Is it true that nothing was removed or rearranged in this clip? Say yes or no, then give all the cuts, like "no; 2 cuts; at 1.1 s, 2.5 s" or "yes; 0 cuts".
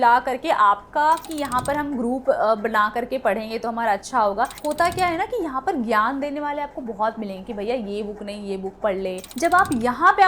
no; 3 cuts; at 1.3 s, 4.6 s, 9.3 s